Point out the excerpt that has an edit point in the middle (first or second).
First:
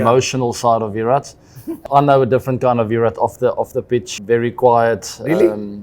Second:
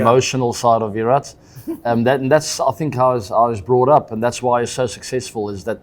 first